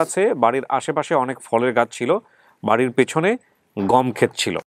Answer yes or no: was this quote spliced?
no